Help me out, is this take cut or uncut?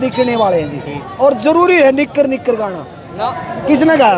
cut